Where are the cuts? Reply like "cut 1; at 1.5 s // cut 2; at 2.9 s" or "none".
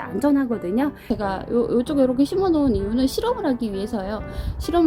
cut 1; at 1.0 s